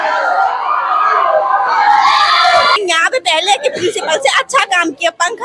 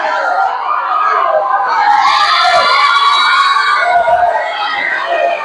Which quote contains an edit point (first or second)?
first